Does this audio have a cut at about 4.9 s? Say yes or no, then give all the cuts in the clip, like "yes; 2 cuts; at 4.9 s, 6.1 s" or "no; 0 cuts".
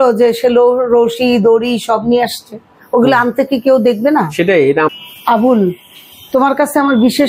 yes; 1 cut; at 4.9 s